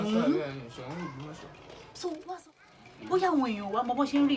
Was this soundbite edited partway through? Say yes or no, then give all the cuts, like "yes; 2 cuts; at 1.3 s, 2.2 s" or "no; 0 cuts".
yes; 1 cut; at 2.2 s